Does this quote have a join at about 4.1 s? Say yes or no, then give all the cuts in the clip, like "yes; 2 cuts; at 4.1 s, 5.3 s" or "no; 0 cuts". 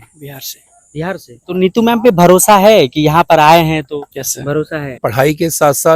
yes; 3 cuts; at 1.3 s, 4.1 s, 5.0 s